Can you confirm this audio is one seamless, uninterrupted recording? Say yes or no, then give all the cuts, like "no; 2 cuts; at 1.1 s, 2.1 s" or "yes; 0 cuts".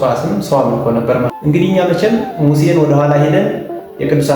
no; 1 cut; at 1.3 s